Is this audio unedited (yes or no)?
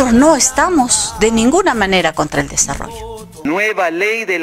no